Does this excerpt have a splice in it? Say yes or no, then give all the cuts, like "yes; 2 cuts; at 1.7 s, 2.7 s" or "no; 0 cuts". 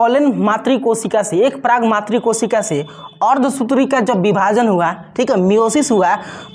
no; 0 cuts